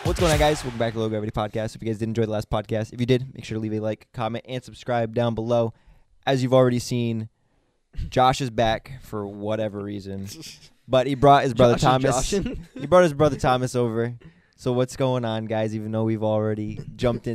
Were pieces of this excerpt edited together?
no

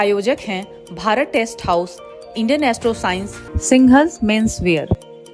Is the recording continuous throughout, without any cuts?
yes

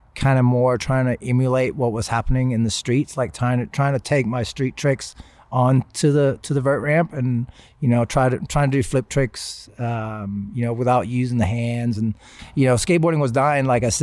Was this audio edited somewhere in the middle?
yes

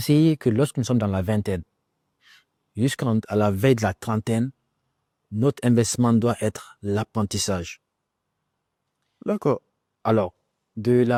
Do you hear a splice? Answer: no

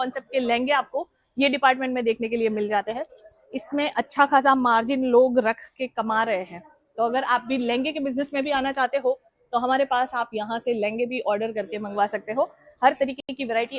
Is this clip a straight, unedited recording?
yes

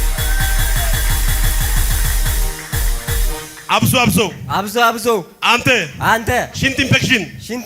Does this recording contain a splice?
no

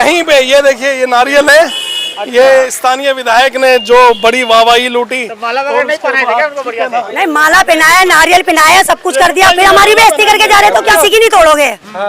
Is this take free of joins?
no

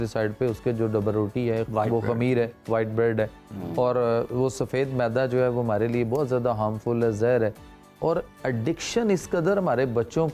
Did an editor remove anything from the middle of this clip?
no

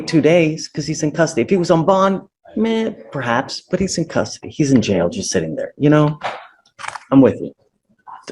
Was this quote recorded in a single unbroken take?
no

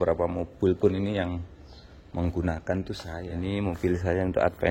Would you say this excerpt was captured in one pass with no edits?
no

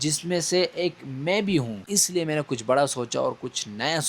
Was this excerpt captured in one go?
no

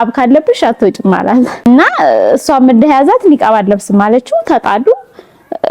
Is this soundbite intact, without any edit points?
no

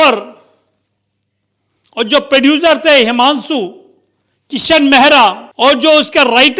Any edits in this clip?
yes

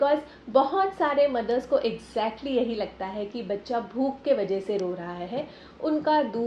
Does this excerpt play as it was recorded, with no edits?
yes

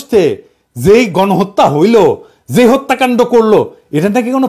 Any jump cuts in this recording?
no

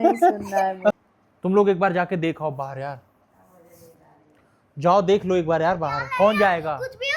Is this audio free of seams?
no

